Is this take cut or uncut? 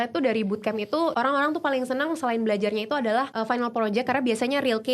cut